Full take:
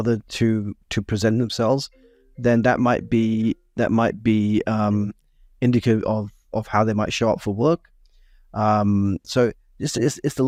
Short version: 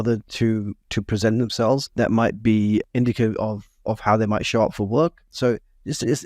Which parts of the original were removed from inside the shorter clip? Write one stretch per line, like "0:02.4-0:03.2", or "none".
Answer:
0:01.9-0:03.7
0:04.7-0:05.5
0:08.0-0:09.2